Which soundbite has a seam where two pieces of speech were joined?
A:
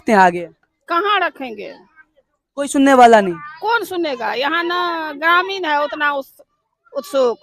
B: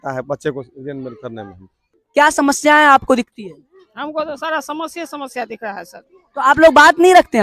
B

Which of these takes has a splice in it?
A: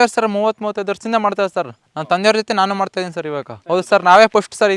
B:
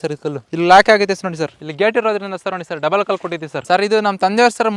B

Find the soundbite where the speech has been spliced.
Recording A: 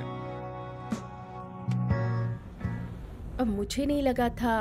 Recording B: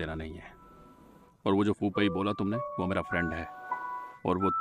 A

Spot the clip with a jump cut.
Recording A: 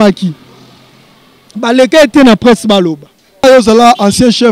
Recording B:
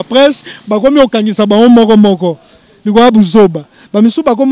A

